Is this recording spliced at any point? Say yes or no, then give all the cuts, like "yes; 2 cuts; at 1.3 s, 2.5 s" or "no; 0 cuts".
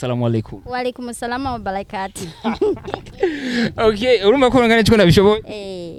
no; 0 cuts